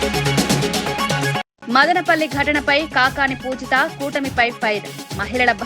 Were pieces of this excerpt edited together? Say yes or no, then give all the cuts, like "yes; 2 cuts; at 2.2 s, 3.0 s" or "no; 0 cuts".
yes; 1 cut; at 1.4 s